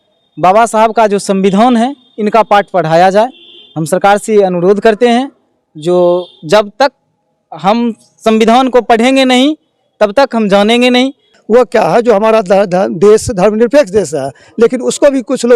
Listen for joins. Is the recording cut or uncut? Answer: cut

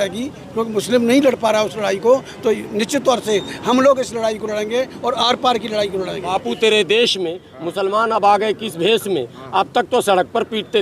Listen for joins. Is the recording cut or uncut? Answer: cut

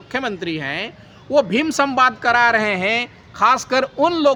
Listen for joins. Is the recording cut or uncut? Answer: uncut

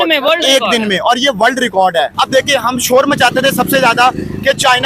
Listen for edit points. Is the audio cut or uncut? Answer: cut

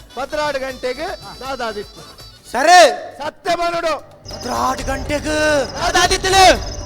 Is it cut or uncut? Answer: cut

